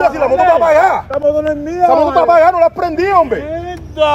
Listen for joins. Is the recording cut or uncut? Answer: uncut